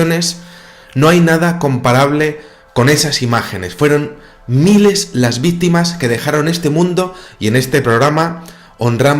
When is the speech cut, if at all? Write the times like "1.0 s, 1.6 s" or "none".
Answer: 1.9 s